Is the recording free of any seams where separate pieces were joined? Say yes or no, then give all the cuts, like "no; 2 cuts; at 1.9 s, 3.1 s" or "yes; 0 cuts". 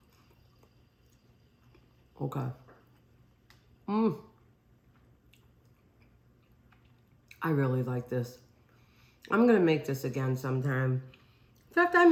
yes; 0 cuts